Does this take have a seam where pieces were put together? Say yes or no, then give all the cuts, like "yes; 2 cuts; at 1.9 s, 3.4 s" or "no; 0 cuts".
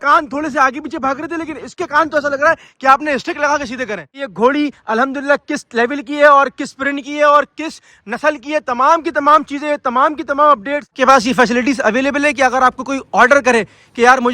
yes; 2 cuts; at 4.2 s, 11.0 s